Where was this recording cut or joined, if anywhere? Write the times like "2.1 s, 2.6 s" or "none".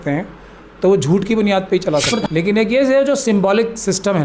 2.2 s